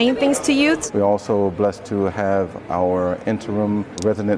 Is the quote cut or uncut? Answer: uncut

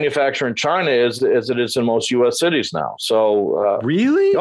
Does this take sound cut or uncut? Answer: uncut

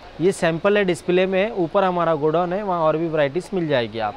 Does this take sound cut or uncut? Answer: uncut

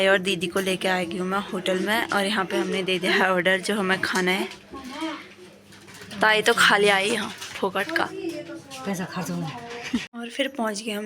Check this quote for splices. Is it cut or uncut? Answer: cut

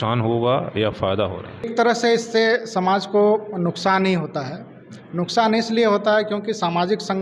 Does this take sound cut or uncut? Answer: cut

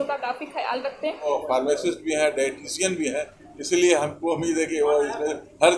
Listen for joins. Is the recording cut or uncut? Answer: cut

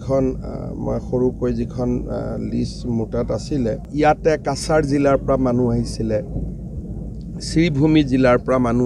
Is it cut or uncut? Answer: cut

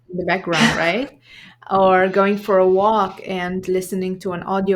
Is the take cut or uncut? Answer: uncut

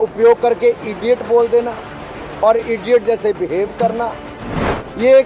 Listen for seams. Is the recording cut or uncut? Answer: cut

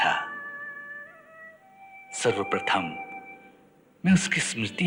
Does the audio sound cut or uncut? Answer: uncut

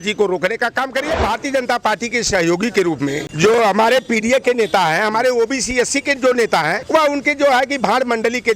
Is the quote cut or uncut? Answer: cut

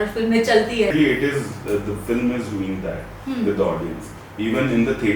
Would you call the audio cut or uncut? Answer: cut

